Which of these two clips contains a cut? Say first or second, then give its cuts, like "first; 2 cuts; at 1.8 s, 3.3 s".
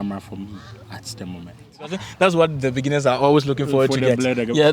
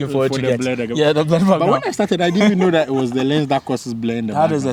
first; 1 cut; at 2.0 s